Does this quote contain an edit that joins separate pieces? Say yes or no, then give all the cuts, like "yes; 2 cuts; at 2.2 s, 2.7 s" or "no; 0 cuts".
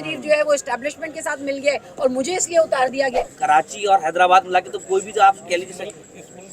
yes; 1 cut; at 3.1 s